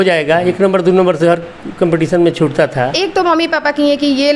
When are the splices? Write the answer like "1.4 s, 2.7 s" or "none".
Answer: 2.9 s